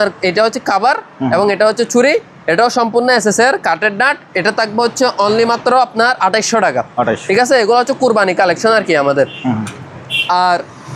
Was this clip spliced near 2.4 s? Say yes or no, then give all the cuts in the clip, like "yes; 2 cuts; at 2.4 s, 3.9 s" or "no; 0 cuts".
no; 0 cuts